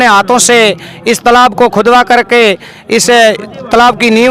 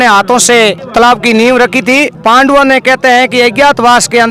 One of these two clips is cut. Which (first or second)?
second